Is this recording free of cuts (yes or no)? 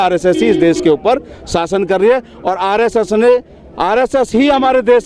yes